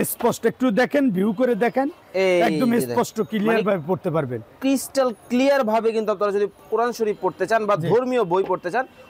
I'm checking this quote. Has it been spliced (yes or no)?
no